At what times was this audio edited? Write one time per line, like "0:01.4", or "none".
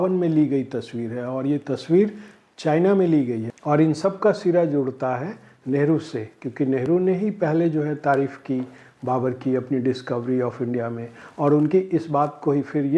0:03.5